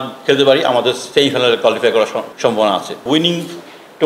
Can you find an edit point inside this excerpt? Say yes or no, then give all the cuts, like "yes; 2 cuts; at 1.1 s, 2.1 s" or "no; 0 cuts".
yes; 3 cuts; at 1.0 s, 2.3 s, 3.0 s